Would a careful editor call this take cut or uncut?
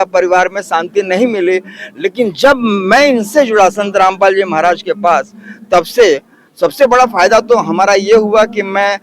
uncut